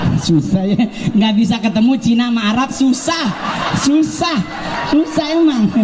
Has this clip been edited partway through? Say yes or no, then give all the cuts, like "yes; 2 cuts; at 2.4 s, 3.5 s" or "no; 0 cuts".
no; 0 cuts